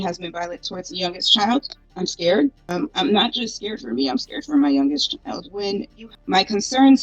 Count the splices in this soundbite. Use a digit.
3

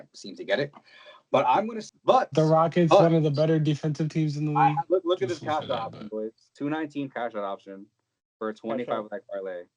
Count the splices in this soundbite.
1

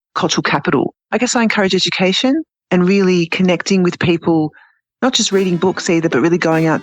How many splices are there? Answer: 2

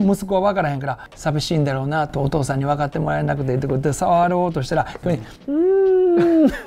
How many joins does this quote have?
1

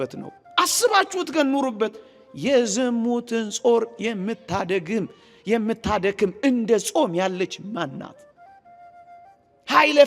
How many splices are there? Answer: 0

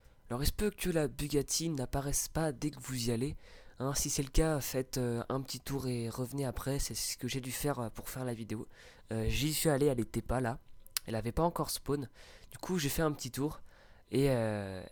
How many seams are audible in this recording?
0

